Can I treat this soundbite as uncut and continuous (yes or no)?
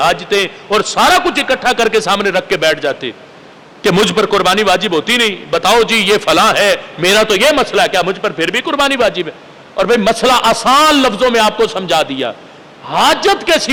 yes